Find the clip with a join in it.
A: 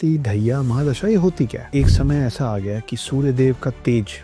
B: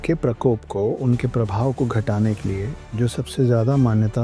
A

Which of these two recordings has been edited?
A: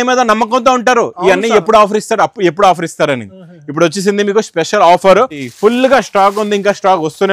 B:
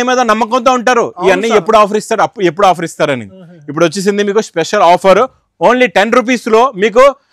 A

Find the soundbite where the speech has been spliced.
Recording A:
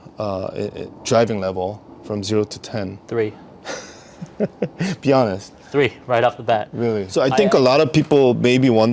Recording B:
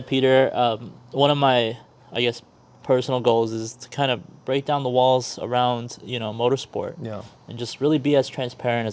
A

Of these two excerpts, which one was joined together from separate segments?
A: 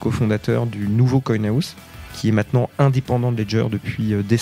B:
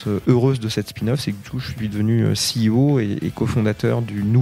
A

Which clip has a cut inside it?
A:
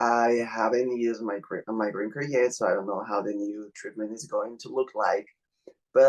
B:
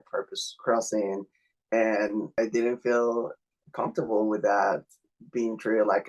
B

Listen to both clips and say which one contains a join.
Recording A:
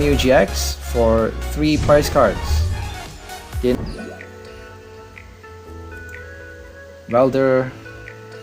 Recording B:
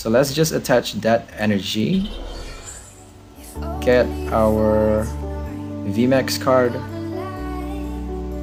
A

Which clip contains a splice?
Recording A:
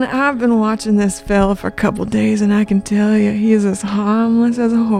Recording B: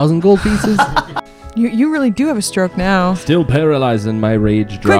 B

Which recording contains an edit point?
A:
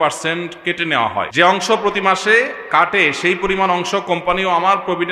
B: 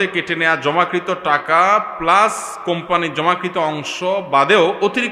A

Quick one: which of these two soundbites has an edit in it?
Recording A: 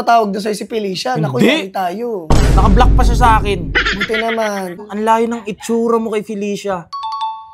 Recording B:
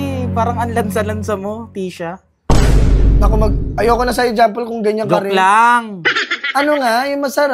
A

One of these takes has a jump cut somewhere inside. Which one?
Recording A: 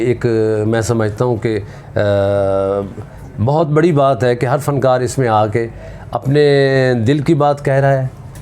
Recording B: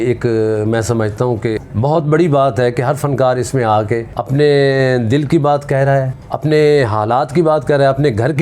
B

